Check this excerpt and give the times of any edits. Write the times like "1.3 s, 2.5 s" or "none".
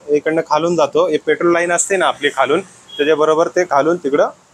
none